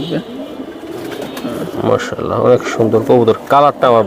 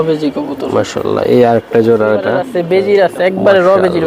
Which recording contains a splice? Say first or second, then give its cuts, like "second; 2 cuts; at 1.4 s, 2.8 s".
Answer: second; 1 cut; at 2.6 s